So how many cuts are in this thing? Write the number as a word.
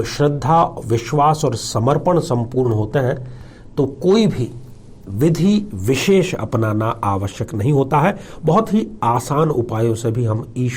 zero